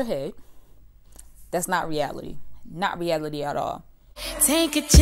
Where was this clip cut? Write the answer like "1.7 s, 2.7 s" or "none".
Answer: 3.8 s